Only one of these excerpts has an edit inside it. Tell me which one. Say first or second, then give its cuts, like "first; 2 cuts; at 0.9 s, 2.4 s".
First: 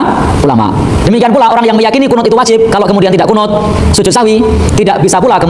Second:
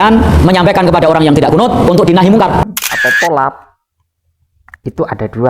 second; 1 cut; at 2.8 s